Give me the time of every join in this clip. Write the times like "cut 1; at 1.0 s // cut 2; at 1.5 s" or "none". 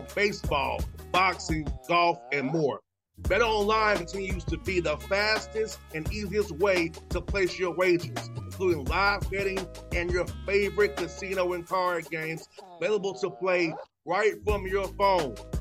none